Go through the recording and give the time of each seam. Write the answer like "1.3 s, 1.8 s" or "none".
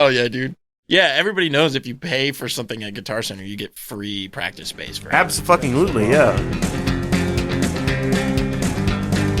6.4 s